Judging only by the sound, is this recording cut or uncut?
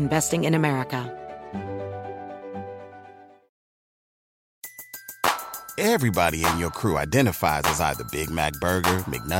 cut